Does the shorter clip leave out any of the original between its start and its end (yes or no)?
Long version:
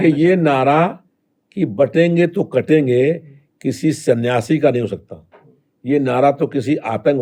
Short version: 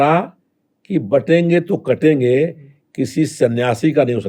no